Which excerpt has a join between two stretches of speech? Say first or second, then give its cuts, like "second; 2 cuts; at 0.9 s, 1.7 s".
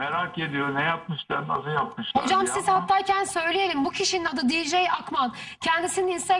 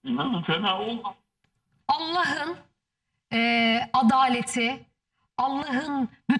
second; 1 cut; at 1.7 s